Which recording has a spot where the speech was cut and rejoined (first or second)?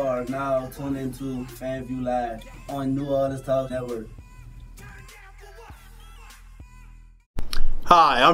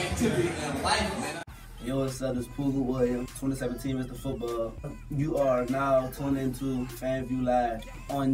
first